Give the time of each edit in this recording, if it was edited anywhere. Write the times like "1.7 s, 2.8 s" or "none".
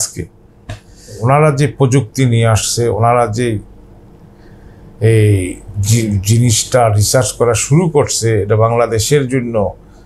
1.2 s